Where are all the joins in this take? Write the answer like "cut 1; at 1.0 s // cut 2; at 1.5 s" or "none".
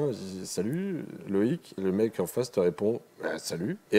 cut 1; at 1.8 s